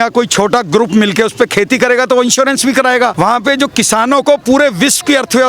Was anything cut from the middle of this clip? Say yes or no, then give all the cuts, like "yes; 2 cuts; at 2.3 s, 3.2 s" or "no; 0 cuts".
yes; 1 cut; at 3.1 s